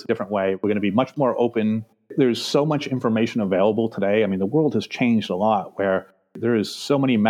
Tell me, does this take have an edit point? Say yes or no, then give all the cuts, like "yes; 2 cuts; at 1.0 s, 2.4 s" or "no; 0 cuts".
yes; 2 cuts; at 2.1 s, 6.1 s